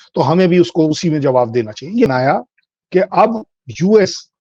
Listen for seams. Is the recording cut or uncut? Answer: cut